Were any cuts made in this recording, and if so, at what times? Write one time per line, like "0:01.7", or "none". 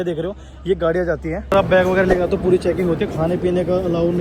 0:01.4